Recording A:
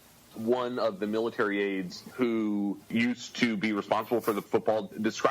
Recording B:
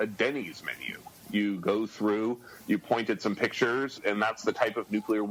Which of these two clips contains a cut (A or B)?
A